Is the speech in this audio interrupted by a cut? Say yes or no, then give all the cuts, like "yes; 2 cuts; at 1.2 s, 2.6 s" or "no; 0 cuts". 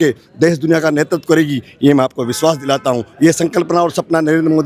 no; 0 cuts